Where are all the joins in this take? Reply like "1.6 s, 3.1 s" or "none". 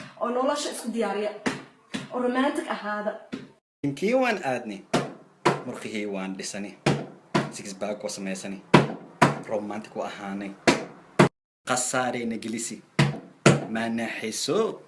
13.2 s